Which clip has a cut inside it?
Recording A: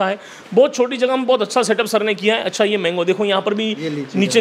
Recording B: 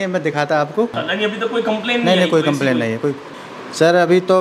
B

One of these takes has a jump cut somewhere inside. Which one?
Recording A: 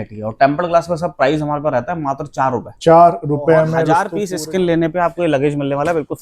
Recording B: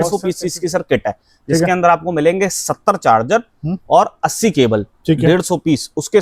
A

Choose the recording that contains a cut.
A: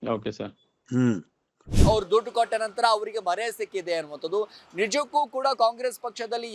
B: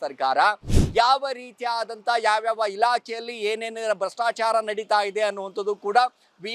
A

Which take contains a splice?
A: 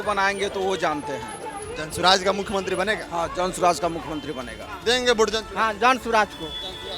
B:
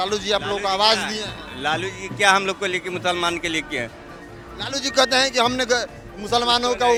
A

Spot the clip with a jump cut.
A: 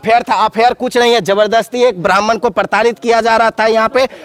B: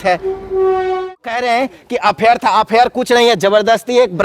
B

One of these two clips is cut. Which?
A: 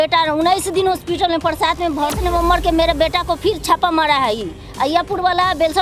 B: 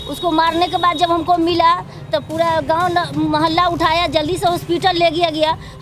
A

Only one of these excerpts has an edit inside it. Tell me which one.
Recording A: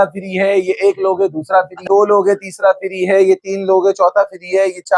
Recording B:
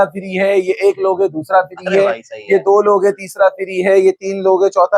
A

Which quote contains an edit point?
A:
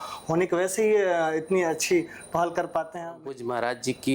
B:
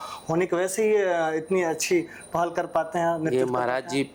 A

